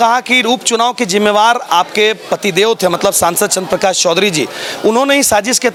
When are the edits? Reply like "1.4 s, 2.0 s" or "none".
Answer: none